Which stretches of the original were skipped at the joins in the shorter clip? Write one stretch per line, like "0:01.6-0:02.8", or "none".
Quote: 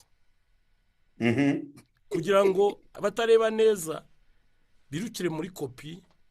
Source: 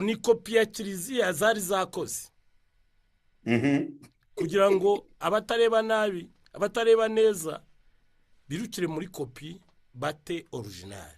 0:05.1-0:06.4